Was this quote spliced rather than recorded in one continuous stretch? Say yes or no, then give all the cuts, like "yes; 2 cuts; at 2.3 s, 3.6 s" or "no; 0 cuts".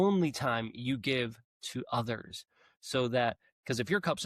no; 0 cuts